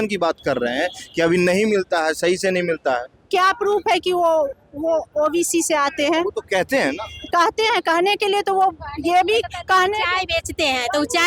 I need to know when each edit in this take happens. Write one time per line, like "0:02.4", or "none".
none